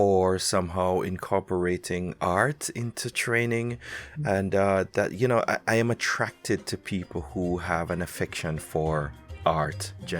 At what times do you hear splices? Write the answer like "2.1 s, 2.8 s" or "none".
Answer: 9.2 s

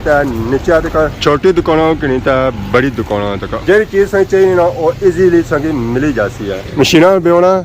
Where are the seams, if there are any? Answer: 1.1 s, 3.5 s, 6.6 s

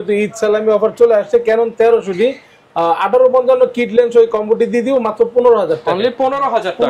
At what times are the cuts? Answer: none

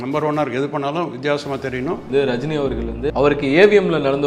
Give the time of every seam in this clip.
2.1 s, 3.1 s

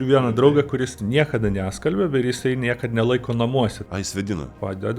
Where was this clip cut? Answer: 1.0 s, 4.2 s

